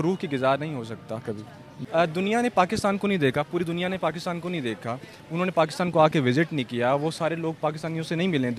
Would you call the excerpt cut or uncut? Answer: cut